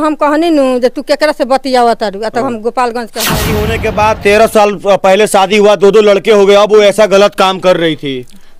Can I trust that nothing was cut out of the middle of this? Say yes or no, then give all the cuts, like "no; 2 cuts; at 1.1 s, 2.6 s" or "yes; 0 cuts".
no; 1 cut; at 3.6 s